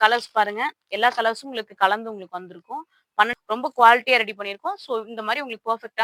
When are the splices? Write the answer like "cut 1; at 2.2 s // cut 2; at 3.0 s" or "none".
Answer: cut 1; at 3.4 s